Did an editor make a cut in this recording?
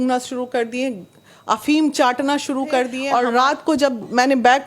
yes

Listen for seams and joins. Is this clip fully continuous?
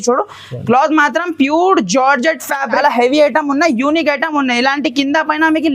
no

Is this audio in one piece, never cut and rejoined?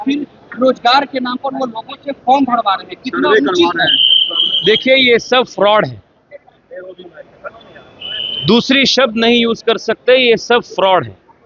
yes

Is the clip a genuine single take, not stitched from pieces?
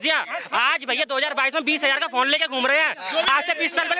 yes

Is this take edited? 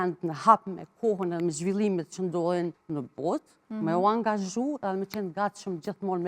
yes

